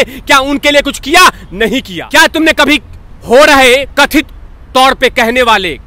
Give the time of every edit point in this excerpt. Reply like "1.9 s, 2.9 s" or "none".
2.0 s